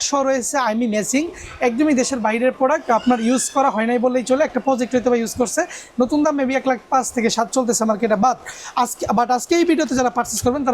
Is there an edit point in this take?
no; 0 cuts

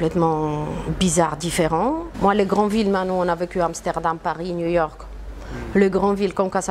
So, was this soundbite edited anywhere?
yes; 1 cut; at 2.1 s

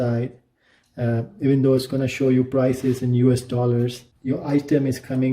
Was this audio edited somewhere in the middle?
yes; 1 cut; at 4.1 s

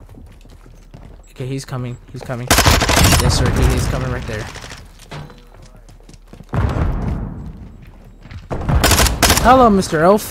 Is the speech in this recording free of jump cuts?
yes; 0 cuts

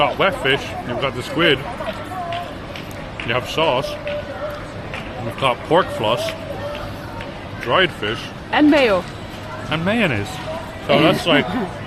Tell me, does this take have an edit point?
no; 0 cuts

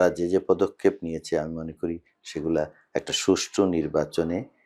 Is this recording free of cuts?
yes; 0 cuts

